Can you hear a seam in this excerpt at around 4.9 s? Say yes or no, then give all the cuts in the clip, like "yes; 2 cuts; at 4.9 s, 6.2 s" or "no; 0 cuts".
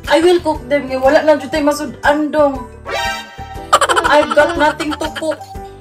no; 0 cuts